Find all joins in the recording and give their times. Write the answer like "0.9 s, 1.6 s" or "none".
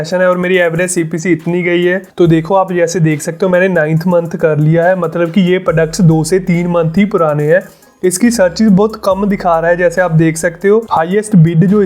2.1 s, 7.9 s, 10.9 s

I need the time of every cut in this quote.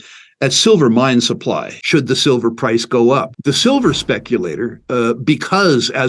1.7 s, 3.3 s

